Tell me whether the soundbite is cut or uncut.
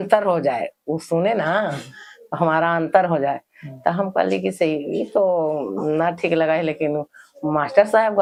uncut